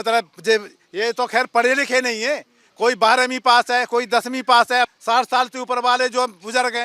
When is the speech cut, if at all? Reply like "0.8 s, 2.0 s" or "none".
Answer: 4.9 s